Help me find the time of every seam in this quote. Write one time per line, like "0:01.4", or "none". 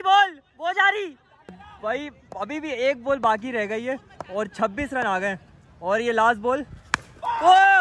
0:01.6